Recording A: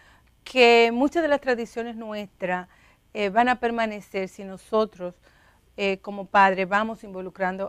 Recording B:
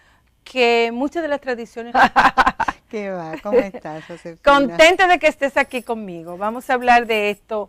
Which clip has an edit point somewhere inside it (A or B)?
A